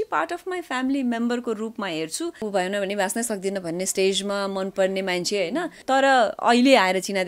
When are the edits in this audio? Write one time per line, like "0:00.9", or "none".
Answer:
0:02.4
0:05.8